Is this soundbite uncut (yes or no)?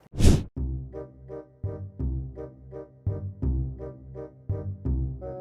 yes